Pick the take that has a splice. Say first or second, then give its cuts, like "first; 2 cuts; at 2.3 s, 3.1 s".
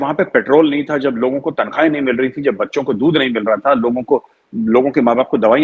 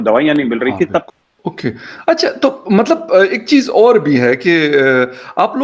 second; 1 cut; at 1.2 s